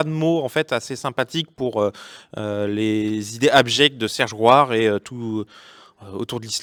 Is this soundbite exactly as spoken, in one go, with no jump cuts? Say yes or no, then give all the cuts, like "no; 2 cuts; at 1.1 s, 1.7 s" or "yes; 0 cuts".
yes; 0 cuts